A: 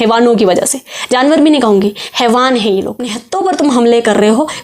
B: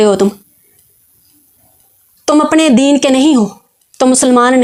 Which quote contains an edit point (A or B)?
A